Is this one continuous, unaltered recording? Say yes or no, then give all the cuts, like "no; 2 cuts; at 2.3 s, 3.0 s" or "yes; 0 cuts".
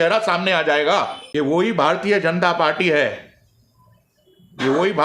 no; 1 cut; at 1.2 s